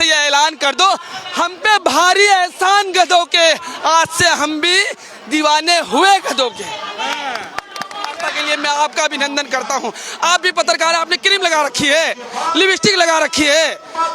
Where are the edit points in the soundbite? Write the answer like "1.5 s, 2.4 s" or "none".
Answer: 8.3 s